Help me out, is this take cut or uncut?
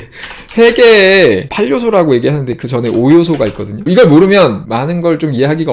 cut